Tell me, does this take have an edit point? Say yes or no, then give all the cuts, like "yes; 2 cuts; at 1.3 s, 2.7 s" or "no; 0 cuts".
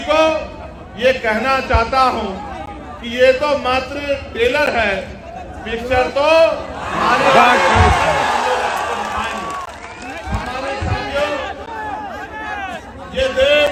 no; 0 cuts